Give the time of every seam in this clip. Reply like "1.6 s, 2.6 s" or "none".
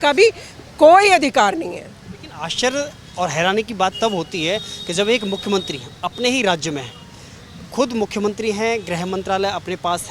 none

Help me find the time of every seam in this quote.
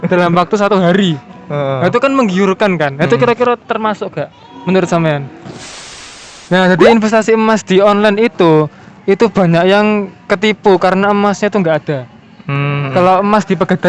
5.9 s

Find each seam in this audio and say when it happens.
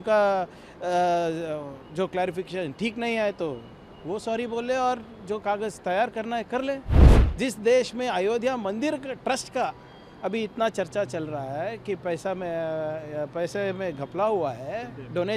7.0 s

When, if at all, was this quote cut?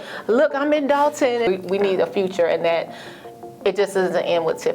1.5 s

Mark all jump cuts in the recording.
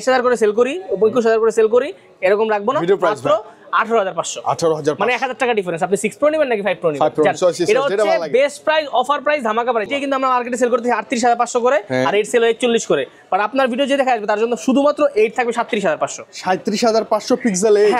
9.9 s

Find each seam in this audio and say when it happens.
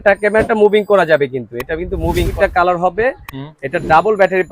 2.3 s

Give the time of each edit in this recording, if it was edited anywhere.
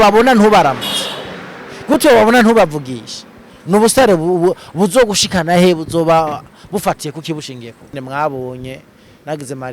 7.9 s

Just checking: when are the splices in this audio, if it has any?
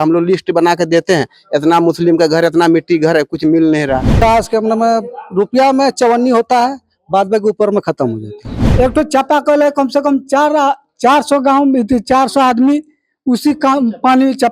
4.2 s, 8.6 s, 12.5 s

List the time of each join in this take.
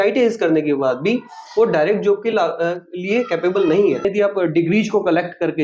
4.1 s

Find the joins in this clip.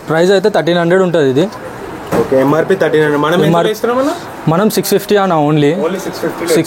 none

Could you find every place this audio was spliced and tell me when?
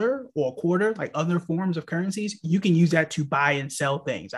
none

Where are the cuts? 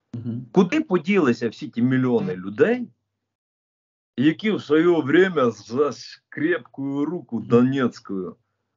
none

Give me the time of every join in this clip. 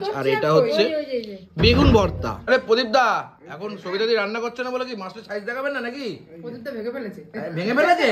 2.3 s

